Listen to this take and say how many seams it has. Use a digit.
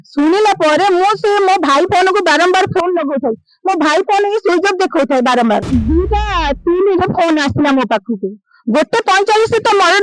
1